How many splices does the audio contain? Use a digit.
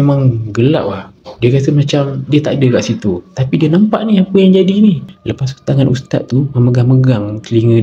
1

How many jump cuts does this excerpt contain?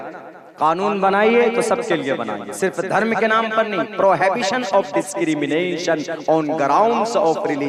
0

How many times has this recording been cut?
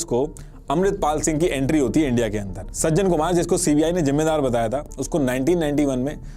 1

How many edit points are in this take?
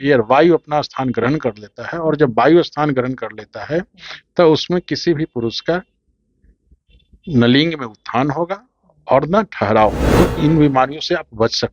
1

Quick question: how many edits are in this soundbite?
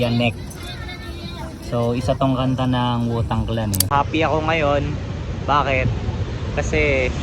1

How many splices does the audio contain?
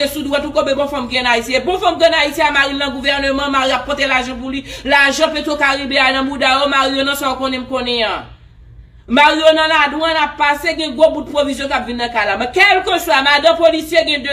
0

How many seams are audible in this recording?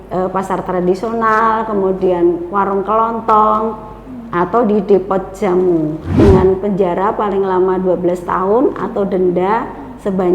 1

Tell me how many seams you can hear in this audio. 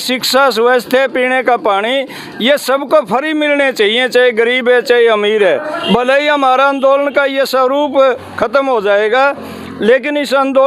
1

